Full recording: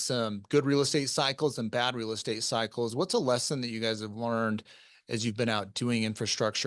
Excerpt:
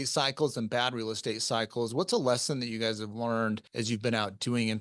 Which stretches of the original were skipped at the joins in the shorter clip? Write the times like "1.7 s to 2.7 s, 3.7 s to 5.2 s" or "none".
4.7 s to 5.0 s